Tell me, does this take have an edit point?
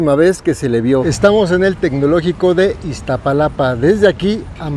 yes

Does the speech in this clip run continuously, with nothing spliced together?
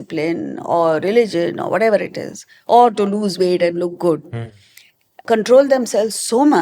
no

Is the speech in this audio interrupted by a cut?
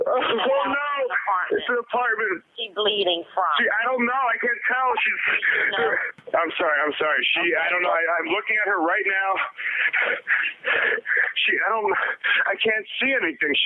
yes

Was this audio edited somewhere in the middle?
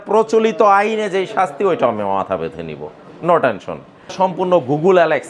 yes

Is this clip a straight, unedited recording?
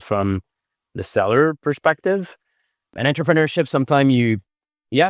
no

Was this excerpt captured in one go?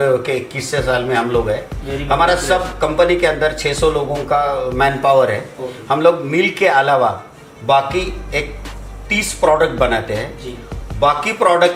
yes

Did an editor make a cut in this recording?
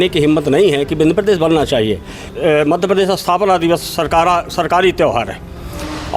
yes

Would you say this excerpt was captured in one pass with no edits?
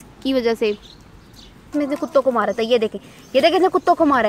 no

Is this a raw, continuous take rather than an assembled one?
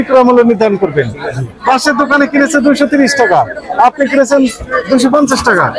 yes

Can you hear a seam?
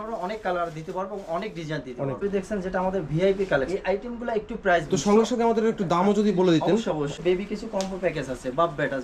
yes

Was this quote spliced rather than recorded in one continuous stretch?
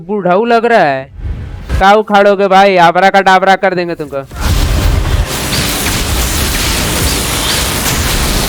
yes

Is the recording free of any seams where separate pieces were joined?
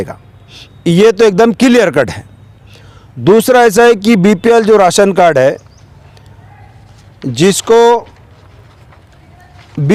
yes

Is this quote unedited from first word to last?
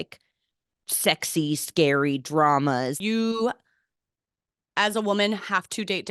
no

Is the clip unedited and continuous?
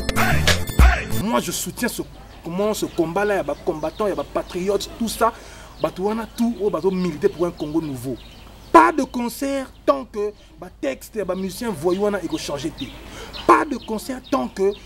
no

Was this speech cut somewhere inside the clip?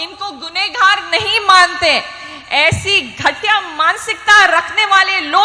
no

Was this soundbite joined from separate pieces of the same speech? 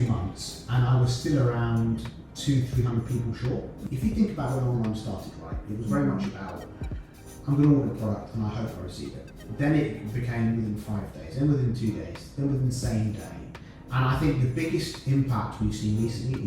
yes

